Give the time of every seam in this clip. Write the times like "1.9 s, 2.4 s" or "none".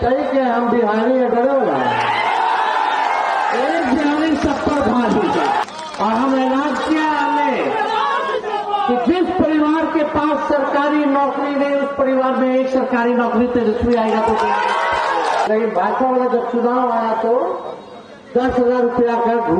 5.6 s, 15.5 s